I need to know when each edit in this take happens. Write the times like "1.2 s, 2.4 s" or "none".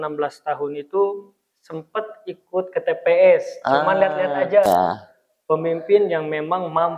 4.6 s